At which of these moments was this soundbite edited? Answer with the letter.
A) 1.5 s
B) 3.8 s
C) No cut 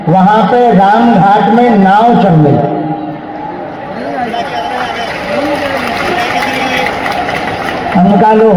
C